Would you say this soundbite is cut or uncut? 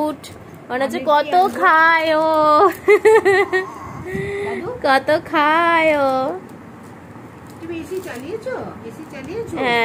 uncut